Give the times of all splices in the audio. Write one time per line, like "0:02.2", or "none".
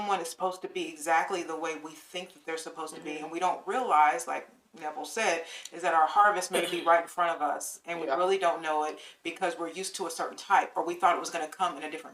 none